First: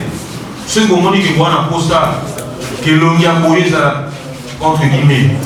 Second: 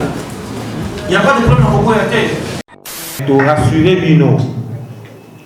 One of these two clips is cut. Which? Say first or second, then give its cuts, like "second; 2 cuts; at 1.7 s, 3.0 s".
second; 1 cut; at 3.2 s